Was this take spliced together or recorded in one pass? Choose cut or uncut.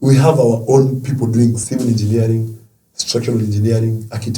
cut